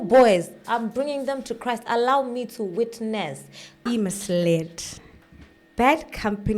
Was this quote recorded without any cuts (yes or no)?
no